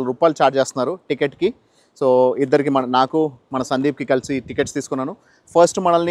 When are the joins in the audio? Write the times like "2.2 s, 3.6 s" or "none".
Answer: none